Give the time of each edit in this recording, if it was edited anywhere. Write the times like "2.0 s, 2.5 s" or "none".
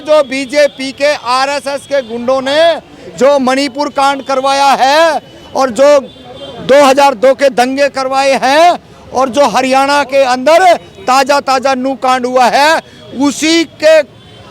none